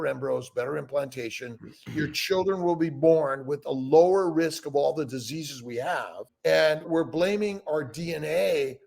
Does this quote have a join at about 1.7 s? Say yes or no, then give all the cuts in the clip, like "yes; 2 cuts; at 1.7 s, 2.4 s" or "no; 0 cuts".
no; 1 cut; at 6.2 s